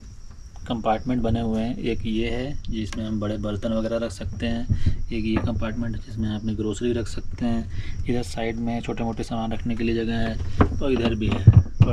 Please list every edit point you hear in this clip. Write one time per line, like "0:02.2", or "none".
none